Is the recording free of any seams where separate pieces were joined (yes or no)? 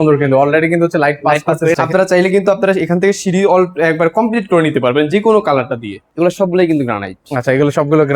no